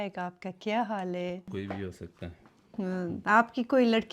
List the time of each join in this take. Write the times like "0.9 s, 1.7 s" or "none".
1.5 s

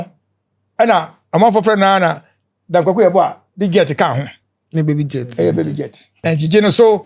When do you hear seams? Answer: 6.1 s

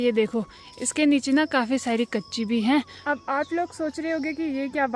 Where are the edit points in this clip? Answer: 2.9 s

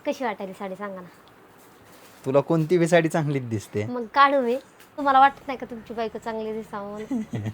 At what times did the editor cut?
4.9 s

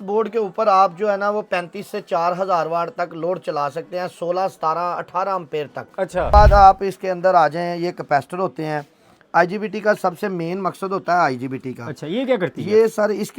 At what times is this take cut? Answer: 6.3 s

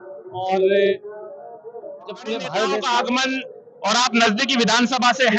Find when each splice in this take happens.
2.8 s

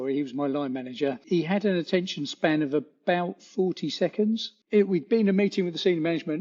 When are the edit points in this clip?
1.2 s, 4.5 s

